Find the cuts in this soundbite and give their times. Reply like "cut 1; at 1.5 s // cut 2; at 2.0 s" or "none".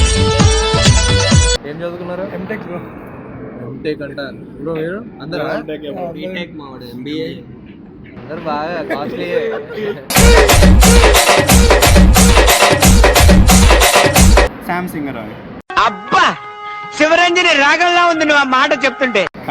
cut 1; at 1.6 s // cut 2; at 14.6 s

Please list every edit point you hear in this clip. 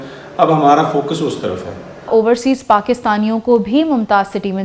cut 1; at 2.1 s

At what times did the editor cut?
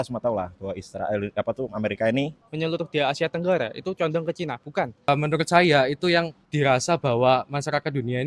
cut 1; at 2.4 s // cut 2; at 5.1 s

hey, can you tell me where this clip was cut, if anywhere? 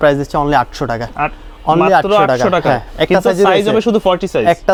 none

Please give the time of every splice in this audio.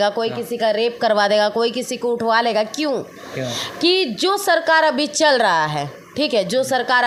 none

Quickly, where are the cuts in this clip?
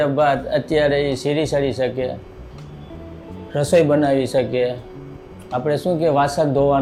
none

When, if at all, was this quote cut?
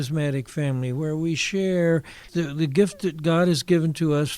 cut 1; at 2.2 s

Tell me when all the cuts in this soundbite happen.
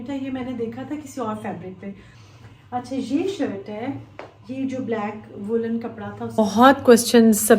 cut 1; at 2.1 s // cut 2; at 6.4 s

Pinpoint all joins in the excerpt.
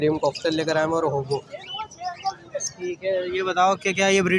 none

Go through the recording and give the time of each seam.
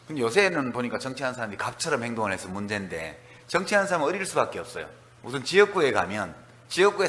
cut 1; at 4.5 s

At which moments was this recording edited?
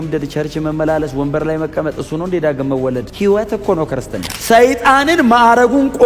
cut 1; at 3.1 s // cut 2; at 4.3 s

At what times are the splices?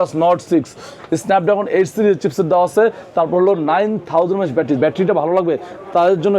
cut 1; at 4.8 s

